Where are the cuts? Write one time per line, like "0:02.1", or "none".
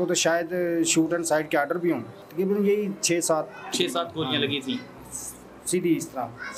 0:02.1